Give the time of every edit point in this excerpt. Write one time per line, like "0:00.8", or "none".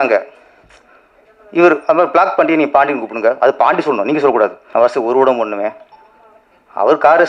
0:04.6